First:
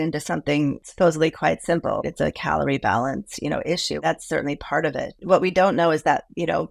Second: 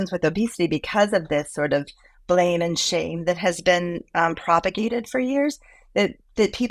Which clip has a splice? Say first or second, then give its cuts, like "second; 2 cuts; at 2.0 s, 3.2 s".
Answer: first; 4 cuts; at 0.8 s, 2.0 s, 4.0 s, 5.2 s